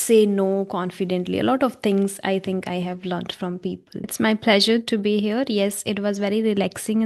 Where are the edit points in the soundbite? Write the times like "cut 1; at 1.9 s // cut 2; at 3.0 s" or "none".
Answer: cut 1; at 4.1 s